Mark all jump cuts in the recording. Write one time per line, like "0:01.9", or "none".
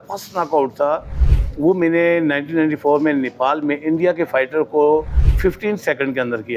none